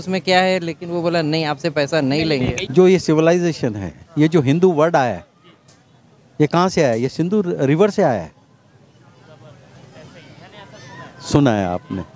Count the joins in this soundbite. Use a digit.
1